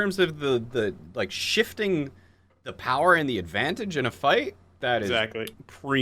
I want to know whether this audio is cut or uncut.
cut